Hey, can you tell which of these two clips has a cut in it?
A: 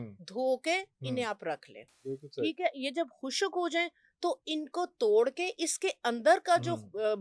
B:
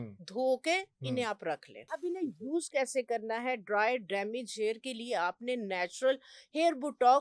B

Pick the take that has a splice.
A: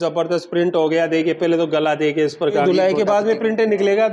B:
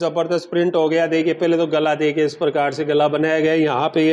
A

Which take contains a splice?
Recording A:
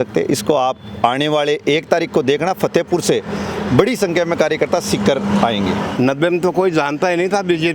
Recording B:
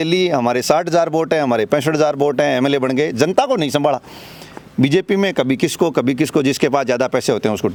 A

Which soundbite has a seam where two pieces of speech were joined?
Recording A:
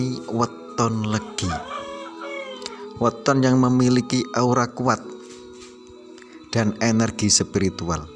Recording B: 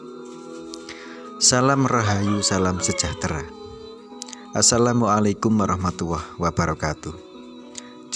A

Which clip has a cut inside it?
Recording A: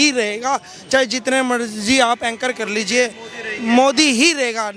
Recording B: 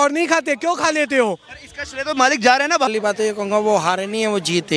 B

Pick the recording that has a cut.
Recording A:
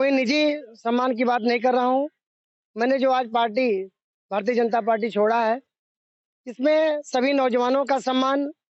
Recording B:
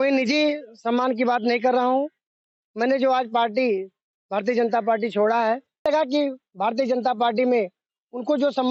B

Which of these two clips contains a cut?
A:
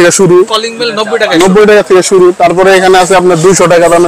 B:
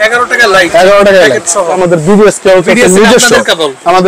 B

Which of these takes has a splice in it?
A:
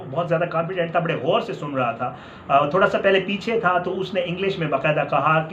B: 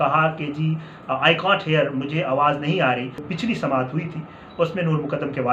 B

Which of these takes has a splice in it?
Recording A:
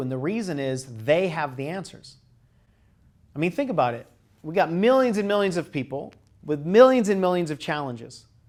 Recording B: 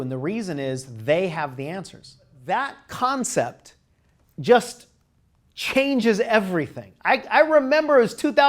B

